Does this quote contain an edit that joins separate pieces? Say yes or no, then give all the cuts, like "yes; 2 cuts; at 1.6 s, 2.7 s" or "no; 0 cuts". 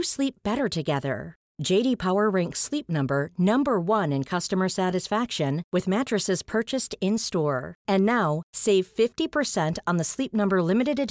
no; 0 cuts